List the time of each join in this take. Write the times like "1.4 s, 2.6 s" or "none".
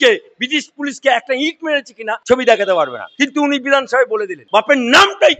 2.1 s, 3.0 s, 4.4 s